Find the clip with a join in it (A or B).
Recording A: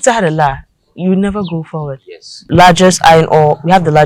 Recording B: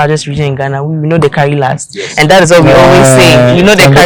A